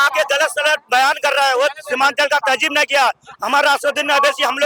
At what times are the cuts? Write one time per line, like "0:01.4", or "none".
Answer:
none